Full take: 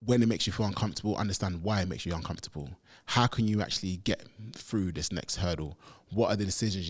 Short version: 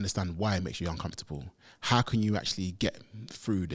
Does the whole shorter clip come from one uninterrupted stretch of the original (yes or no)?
yes